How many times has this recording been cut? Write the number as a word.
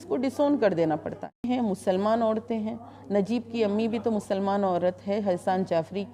one